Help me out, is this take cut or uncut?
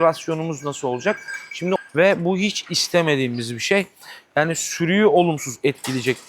cut